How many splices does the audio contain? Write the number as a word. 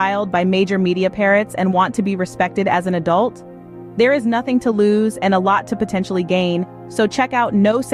zero